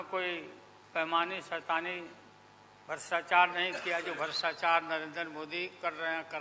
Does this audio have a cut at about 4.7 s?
no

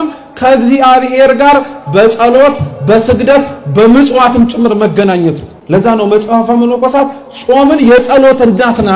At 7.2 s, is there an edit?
no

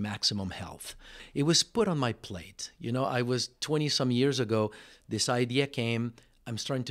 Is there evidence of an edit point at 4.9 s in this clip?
no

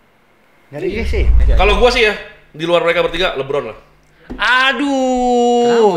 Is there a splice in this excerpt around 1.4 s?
yes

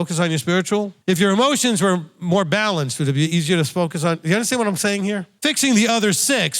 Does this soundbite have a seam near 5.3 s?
yes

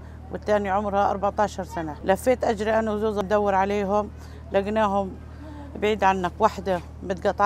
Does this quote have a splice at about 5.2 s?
no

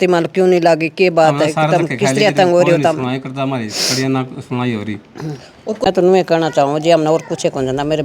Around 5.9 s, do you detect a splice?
yes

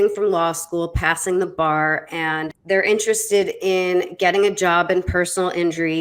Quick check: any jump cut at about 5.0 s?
no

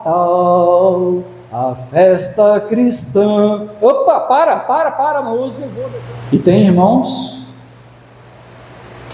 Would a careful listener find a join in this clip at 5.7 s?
yes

